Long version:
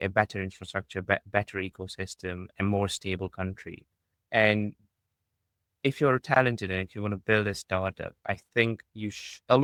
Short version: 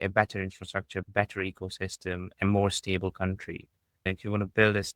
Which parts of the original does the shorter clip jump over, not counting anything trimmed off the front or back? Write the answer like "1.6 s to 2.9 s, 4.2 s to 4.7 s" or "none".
1.0 s to 1.2 s, 4.2 s to 6.7 s